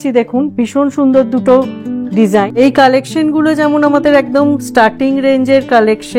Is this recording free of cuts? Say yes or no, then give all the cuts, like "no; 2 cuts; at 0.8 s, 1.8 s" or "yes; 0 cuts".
no; 1 cut; at 2.5 s